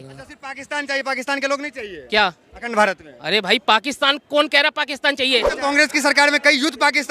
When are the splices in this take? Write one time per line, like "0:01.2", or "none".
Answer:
0:05.5